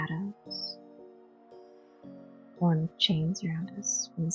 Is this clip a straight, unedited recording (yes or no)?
yes